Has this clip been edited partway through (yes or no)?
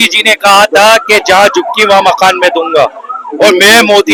no